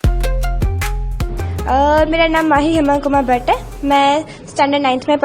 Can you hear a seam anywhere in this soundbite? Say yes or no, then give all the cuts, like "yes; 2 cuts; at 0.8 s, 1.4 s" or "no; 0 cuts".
yes; 1 cut; at 1.6 s